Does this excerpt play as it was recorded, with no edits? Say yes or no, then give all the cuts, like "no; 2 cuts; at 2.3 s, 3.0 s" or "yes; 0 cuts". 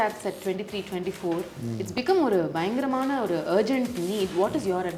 yes; 0 cuts